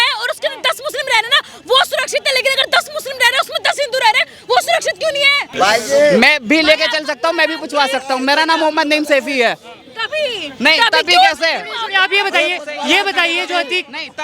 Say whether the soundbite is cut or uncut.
cut